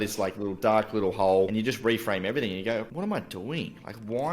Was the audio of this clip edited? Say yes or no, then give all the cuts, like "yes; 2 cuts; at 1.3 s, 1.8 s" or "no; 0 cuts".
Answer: yes; 2 cuts; at 1.5 s, 2.9 s